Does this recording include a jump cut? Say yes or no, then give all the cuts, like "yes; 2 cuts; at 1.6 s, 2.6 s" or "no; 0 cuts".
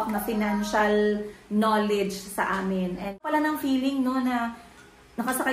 yes; 1 cut; at 3.2 s